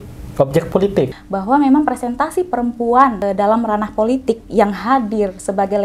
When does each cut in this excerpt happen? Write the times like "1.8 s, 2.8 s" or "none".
1.1 s, 3.2 s